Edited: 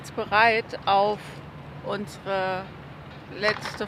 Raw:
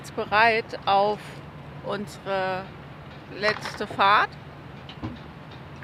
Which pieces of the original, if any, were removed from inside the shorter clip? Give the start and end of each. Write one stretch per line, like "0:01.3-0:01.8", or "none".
none